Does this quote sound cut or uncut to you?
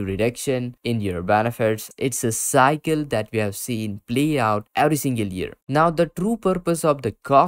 cut